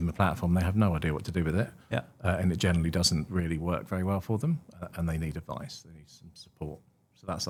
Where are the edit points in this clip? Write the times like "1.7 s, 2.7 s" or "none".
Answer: none